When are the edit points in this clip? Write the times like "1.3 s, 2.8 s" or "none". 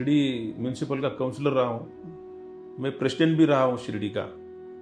none